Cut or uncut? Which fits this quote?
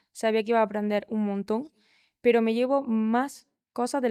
uncut